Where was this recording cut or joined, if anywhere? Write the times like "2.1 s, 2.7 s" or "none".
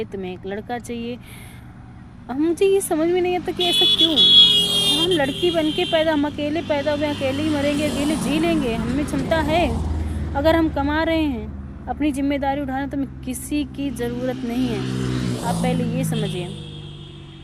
none